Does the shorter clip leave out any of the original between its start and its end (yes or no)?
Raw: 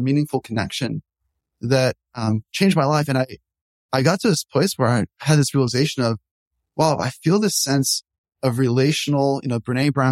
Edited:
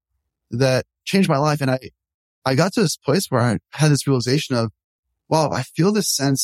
yes